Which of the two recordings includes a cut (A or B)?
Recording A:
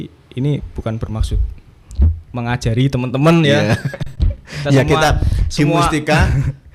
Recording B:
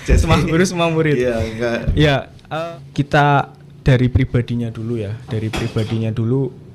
B